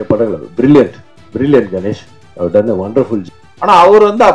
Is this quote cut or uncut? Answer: cut